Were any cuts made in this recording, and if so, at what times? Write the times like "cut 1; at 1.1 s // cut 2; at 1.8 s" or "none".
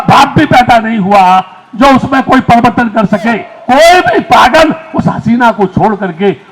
cut 1; at 3.5 s